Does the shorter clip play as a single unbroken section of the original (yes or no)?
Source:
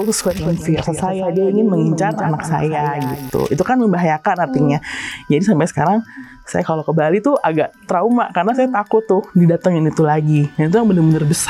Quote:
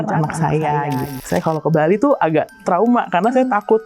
no